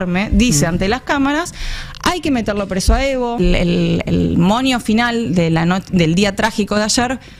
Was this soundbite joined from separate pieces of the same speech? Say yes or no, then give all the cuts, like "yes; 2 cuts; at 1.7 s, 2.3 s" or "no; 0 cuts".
yes; 1 cut; at 3.4 s